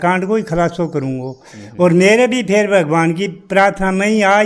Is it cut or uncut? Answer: uncut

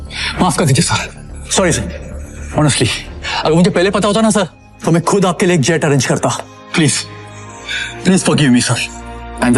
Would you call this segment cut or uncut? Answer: uncut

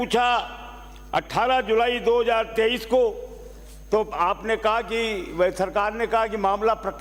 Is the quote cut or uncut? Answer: uncut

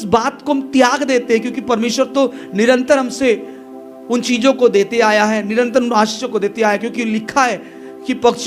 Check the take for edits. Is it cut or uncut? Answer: uncut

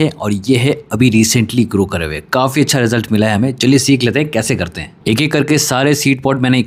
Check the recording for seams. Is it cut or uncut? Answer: uncut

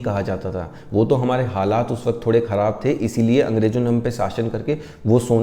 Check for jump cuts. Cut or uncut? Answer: uncut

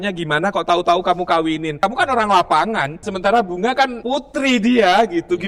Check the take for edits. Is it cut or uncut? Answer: cut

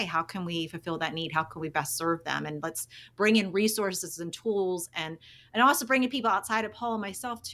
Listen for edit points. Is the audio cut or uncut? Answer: uncut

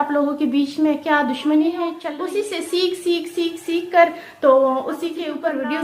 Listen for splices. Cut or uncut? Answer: cut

